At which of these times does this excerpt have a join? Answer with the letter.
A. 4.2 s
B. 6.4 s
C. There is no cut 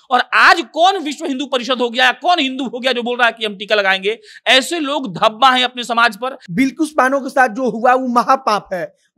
B